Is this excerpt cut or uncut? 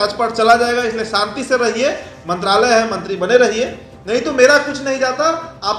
uncut